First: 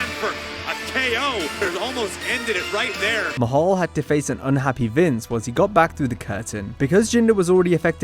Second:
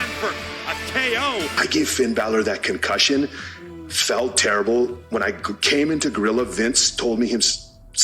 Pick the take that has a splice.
second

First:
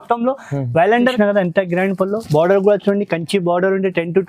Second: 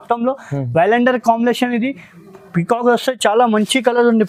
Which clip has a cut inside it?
first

